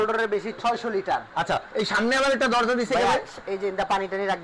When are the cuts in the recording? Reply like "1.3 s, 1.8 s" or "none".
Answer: none